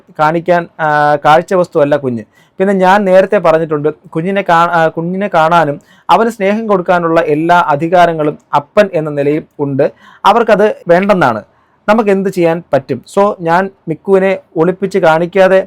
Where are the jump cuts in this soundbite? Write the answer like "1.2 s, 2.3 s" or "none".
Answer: none

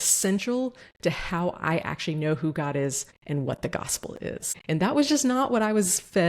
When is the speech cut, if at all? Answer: 4.5 s

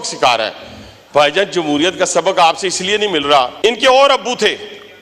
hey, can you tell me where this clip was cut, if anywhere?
3.5 s

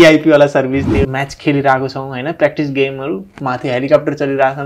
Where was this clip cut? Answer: 1.1 s

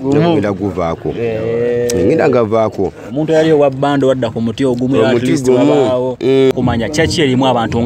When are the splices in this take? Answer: 6.5 s

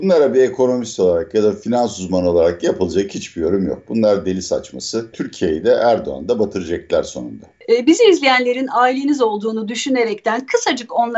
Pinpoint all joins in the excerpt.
5.2 s, 7.5 s

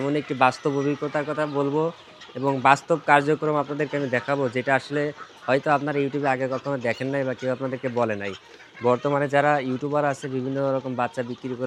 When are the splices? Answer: none

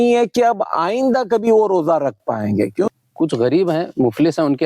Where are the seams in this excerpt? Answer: 2.9 s

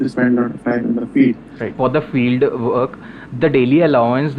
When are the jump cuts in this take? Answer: 1.7 s

